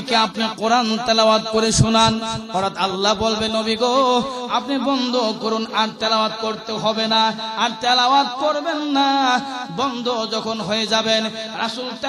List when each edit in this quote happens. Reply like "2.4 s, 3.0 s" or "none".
none